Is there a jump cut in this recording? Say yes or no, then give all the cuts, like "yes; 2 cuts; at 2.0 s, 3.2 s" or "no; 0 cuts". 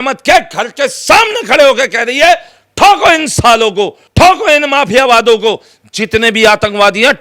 no; 0 cuts